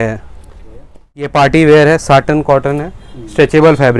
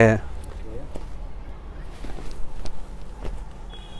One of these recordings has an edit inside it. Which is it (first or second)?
first